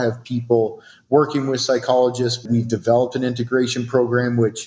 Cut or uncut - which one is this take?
cut